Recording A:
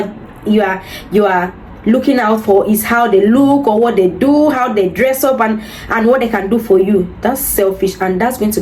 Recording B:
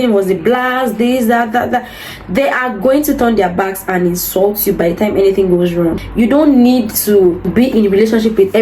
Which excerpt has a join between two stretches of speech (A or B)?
B